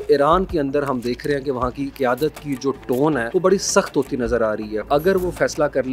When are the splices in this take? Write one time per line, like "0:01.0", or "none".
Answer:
0:01.9
0:03.3
0:04.9